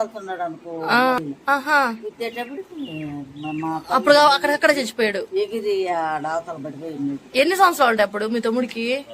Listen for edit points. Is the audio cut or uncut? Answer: cut